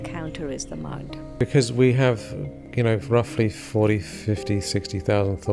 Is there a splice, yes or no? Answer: yes